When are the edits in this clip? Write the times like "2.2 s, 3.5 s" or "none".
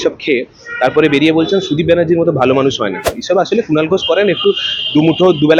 3.2 s